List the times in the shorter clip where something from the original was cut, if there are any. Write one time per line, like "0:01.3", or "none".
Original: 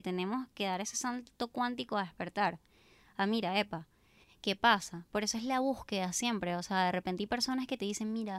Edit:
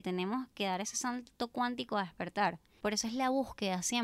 0:02.7